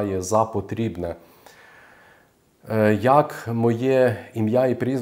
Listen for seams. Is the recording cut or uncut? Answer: uncut